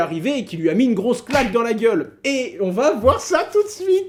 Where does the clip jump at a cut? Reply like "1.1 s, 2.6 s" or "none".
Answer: none